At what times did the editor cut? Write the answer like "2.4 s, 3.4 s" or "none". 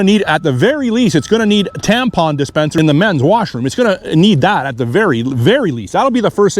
2.7 s